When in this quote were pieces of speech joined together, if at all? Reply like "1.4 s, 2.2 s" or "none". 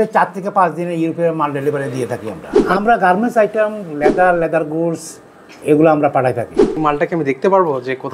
2.7 s, 6.8 s